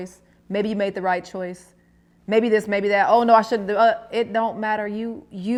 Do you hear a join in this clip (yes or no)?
no